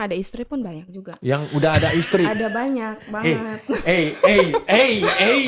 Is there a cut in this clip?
no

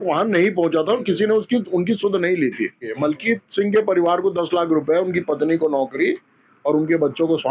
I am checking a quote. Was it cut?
yes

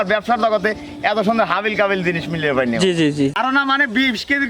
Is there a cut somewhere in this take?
yes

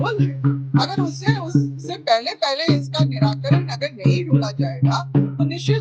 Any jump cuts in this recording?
no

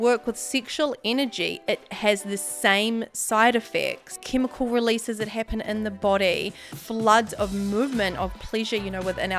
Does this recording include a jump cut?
yes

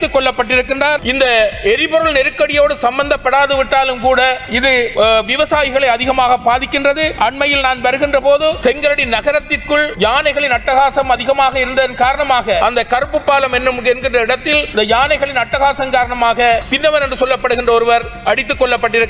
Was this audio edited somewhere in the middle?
yes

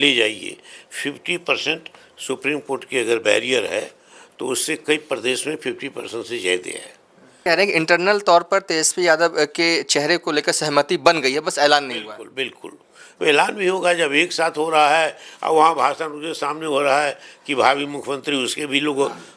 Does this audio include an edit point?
yes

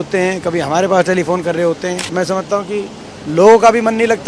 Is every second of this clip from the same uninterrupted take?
no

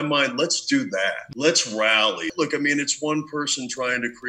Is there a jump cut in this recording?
yes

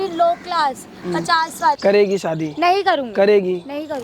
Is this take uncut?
no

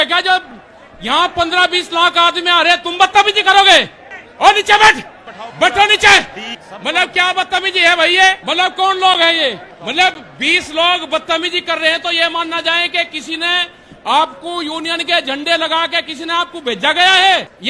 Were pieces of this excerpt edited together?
no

